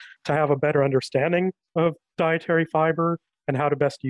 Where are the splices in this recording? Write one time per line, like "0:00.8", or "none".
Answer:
0:01.7